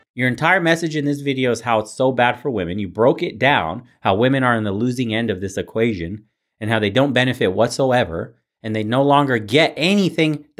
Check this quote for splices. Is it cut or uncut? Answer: uncut